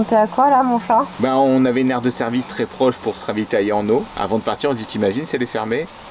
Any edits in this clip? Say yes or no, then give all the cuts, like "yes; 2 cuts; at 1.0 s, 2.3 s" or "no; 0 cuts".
no; 0 cuts